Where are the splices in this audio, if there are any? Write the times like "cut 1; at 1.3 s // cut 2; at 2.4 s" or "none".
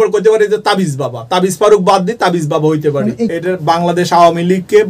cut 1; at 2.9 s